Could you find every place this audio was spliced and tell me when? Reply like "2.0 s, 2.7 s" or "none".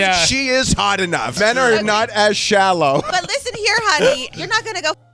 1.3 s, 3.1 s, 4.3 s